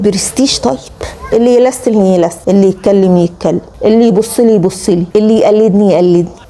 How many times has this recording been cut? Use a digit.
1